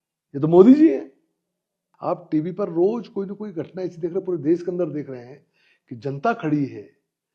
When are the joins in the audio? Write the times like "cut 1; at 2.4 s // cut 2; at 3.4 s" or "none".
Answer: cut 1; at 1.8 s